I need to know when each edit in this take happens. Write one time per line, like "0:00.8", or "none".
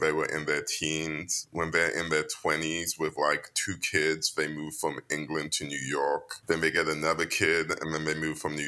0:06.3

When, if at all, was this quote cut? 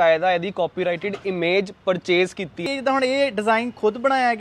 0:03.0

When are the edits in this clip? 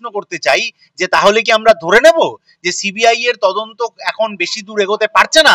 none

